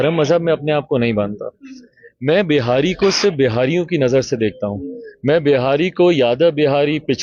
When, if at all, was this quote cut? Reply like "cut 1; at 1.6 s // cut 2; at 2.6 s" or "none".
none

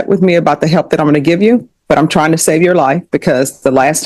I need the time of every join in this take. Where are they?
none

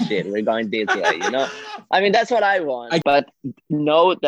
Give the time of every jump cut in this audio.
cut 1; at 3.0 s

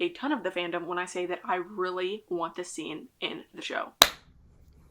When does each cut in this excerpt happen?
cut 1; at 3.9 s

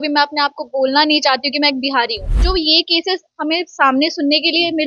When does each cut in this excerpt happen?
cut 1; at 2.3 s

